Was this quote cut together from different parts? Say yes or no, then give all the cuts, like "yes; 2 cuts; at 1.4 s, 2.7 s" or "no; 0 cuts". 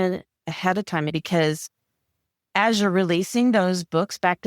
yes; 1 cut; at 1.1 s